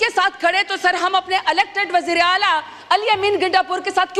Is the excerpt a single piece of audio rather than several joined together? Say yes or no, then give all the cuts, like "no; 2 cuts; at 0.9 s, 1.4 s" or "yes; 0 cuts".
yes; 0 cuts